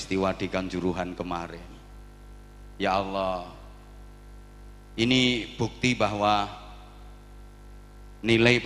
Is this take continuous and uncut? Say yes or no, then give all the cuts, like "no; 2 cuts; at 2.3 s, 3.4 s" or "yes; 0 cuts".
yes; 0 cuts